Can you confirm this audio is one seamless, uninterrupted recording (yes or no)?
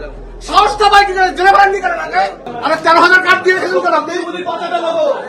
no